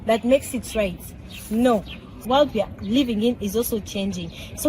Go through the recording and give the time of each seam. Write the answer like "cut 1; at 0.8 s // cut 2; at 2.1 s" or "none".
cut 1; at 2.2 s